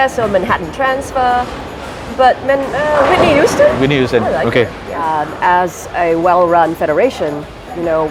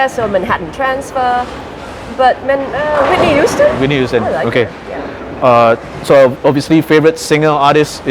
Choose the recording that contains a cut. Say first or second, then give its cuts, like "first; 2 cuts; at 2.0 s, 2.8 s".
first; 1 cut; at 5.1 s